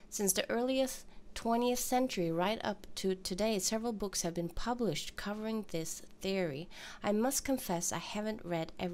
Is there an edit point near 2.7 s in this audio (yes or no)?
yes